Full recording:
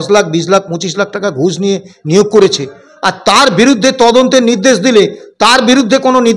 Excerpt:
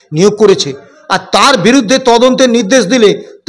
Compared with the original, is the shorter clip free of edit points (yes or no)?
yes